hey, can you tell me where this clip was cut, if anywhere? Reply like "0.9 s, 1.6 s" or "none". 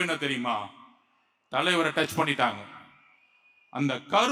none

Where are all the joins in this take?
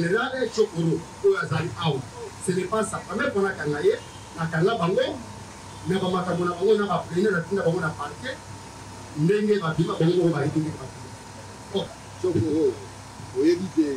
12.0 s

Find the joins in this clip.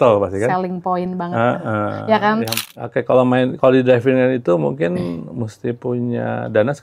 2.5 s

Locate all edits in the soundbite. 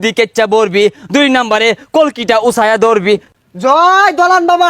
3.3 s

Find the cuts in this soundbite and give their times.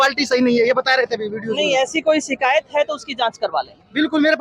none

